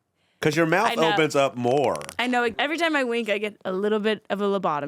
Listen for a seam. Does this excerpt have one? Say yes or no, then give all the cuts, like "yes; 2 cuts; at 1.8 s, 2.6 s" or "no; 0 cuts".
yes; 1 cut; at 2.6 s